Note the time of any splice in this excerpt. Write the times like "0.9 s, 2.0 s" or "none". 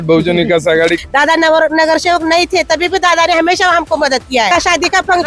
1.0 s, 4.5 s